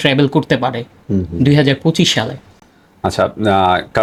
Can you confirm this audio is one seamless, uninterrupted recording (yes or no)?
yes